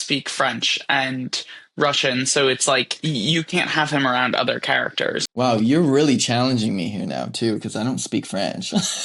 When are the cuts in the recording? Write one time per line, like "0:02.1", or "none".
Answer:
0:02.9
0:05.3